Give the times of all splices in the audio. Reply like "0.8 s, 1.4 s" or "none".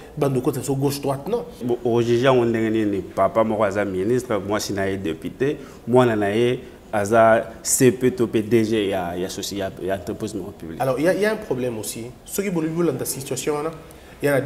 1.6 s